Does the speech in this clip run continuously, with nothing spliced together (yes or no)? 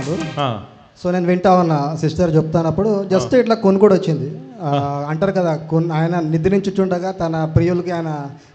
yes